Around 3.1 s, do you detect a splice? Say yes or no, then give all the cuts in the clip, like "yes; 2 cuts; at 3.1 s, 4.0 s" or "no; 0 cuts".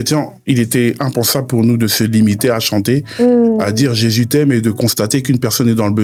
no; 0 cuts